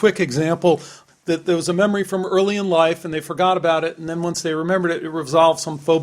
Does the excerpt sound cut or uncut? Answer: cut